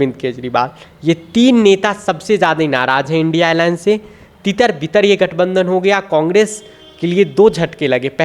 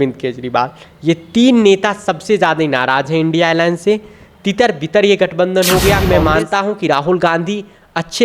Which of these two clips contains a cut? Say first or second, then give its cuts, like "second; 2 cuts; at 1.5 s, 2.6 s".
second; 1 cut; at 6.0 s